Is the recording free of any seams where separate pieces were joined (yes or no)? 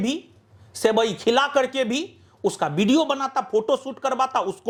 yes